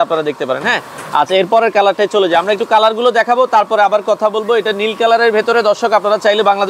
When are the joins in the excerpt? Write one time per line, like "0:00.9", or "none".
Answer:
none